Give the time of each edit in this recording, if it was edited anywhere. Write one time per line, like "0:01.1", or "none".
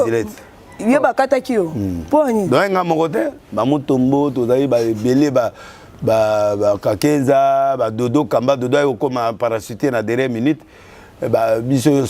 none